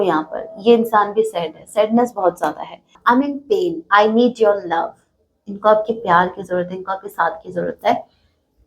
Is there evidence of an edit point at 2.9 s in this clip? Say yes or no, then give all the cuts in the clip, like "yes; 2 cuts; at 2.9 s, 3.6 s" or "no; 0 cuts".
yes; 1 cut; at 2.9 s